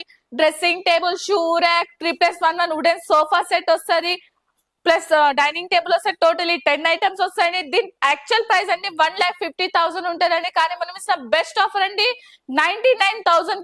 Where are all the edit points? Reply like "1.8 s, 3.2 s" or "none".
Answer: none